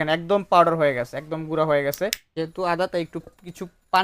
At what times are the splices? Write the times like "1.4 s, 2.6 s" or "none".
2.2 s